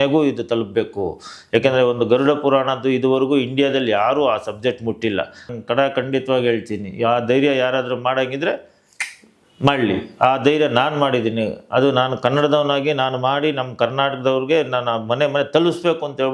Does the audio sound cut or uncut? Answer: cut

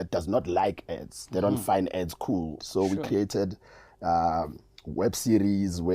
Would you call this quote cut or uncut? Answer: cut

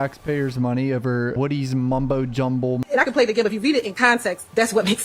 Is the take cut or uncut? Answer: cut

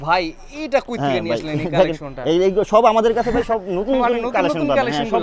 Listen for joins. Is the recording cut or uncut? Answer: uncut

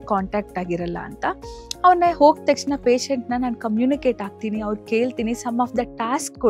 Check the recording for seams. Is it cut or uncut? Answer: uncut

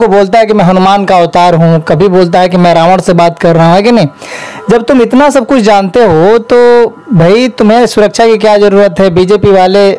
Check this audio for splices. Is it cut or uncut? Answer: uncut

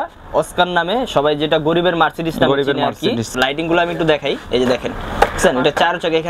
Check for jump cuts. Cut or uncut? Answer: cut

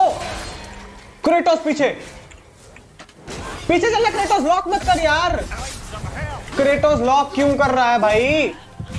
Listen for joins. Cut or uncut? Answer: uncut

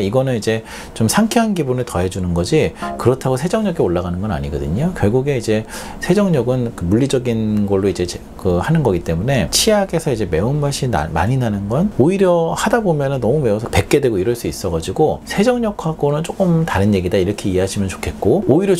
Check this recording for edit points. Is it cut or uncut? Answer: uncut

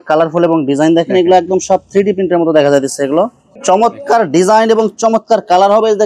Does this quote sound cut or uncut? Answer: cut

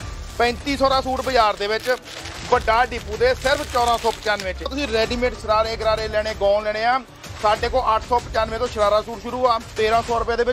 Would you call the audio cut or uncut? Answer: cut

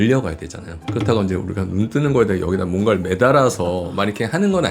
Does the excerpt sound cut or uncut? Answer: uncut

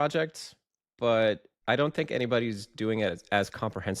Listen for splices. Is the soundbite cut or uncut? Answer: cut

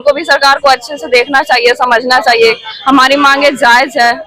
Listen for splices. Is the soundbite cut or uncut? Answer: uncut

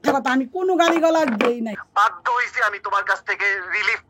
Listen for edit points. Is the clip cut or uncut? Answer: cut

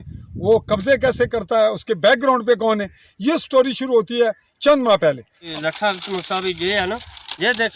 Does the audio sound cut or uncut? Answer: cut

